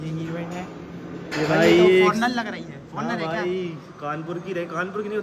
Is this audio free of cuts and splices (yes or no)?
yes